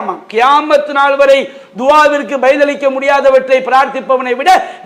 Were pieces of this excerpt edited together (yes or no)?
no